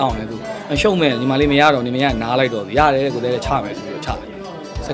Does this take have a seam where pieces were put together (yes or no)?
no